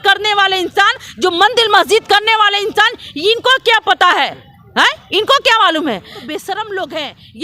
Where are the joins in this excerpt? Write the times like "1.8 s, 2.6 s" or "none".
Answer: 6.2 s